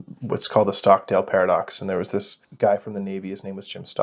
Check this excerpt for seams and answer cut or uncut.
uncut